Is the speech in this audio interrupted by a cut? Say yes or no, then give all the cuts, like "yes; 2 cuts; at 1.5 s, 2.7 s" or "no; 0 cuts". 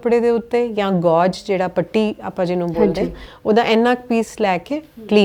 no; 0 cuts